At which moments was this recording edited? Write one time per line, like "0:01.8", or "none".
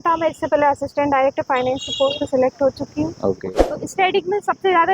0:03.4